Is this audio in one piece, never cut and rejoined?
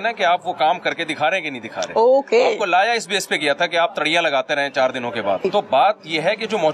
no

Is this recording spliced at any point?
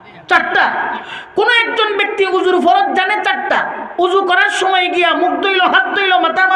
no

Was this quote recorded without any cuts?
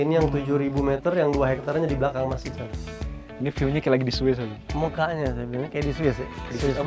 no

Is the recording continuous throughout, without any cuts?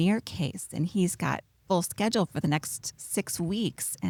yes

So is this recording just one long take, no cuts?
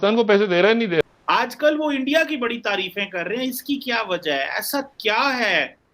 no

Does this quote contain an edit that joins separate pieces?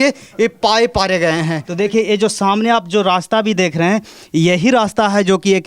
yes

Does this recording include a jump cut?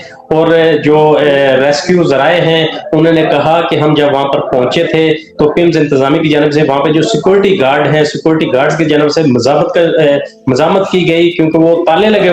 no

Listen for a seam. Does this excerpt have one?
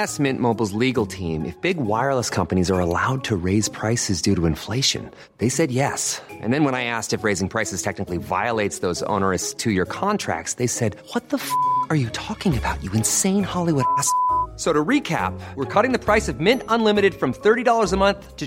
no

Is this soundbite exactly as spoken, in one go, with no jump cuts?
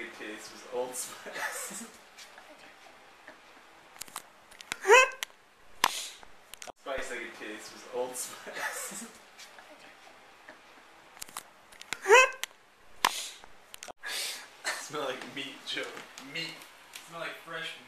no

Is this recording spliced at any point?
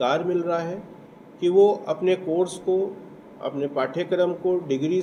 no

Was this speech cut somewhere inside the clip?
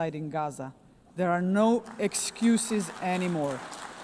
no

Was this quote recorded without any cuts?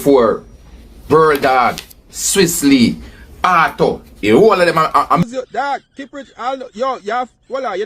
no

